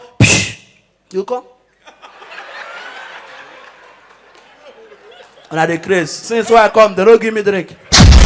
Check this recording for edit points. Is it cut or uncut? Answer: uncut